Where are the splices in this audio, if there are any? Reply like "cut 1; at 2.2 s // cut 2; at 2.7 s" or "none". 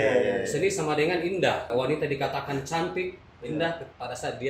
cut 1; at 1.7 s